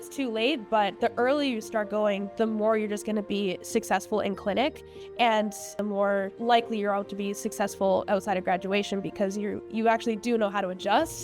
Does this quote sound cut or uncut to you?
cut